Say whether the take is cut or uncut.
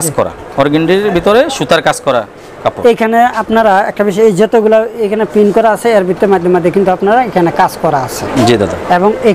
uncut